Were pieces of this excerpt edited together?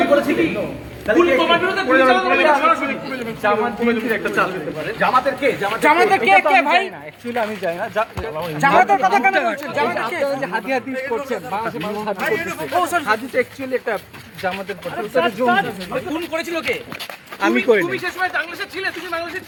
no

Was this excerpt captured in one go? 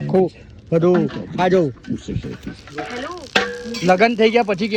yes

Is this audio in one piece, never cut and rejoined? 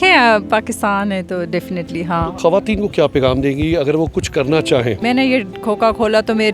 no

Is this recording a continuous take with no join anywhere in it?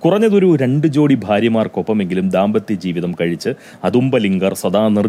yes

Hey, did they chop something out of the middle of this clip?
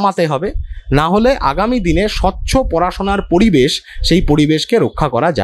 no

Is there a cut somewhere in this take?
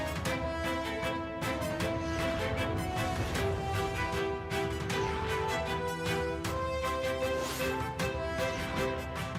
no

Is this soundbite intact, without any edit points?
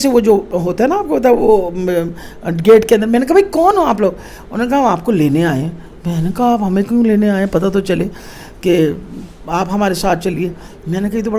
yes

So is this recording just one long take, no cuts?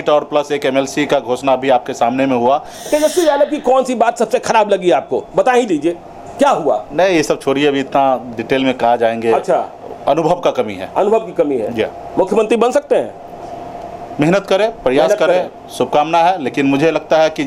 no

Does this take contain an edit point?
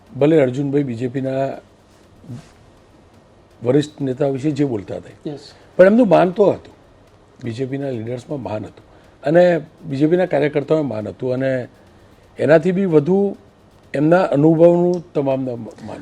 no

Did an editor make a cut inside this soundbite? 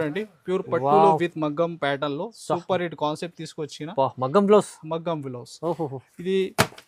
no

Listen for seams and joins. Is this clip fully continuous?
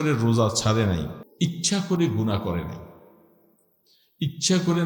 no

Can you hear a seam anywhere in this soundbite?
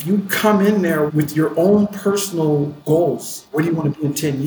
yes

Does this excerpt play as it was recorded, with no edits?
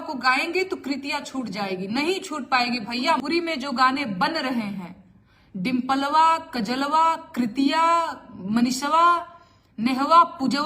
no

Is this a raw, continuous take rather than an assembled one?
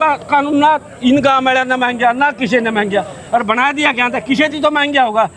yes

